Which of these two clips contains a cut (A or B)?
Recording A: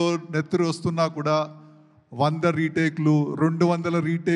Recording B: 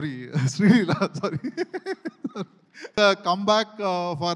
B